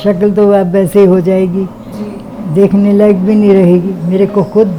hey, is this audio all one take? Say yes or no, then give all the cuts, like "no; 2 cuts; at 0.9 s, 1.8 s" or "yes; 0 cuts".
yes; 0 cuts